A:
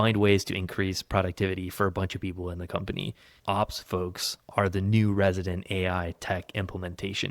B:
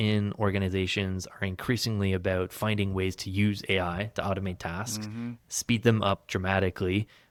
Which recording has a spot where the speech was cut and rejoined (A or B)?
A